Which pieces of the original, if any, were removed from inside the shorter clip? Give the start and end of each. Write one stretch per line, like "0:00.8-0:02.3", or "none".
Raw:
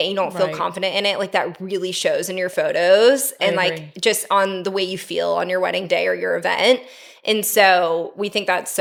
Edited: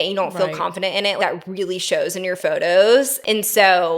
0:01.2-0:01.3
0:03.3-0:07.1